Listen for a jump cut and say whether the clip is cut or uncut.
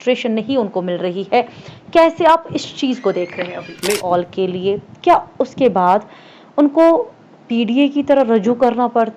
cut